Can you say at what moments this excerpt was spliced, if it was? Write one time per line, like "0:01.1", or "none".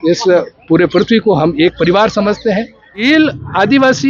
0:03.0

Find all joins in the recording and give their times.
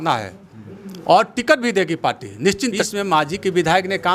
0:02.7

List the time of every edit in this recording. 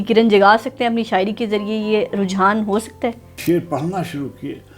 0:03.4

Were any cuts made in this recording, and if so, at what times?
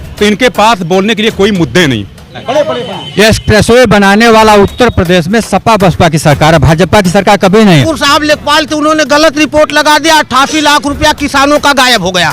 0:02.4
0:07.8

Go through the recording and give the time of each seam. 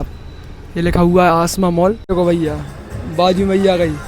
0:02.0

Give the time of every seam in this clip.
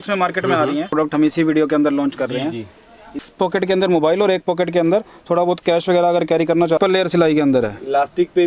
0:00.9
0:03.2
0:06.8

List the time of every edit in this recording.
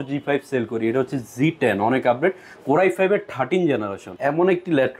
0:04.0

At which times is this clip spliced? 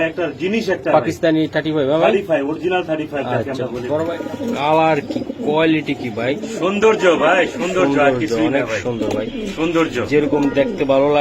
0:04.2

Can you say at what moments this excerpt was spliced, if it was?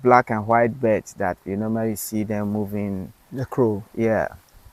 none

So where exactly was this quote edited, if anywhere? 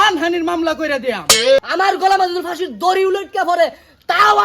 0:01.6

